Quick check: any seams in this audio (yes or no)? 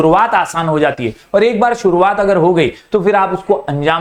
no